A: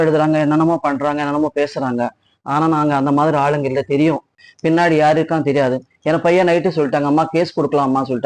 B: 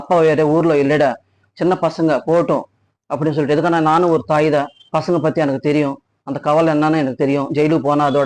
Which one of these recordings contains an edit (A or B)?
A